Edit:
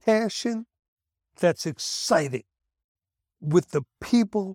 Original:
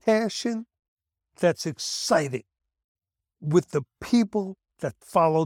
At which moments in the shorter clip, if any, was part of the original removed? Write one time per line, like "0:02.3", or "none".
none